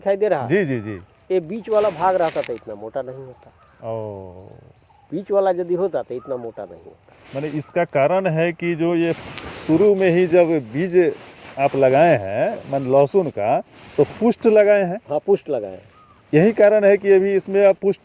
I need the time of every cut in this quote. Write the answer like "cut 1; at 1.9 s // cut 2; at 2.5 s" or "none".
none